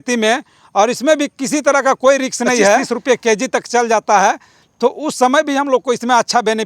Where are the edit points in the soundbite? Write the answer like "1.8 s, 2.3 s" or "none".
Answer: 2.9 s